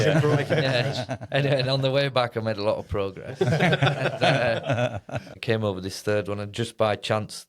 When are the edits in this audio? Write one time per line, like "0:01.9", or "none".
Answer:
0:05.3